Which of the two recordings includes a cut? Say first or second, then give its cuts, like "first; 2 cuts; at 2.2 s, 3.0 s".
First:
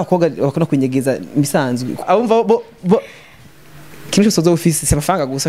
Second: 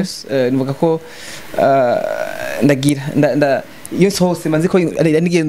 first; 1 cut; at 2.0 s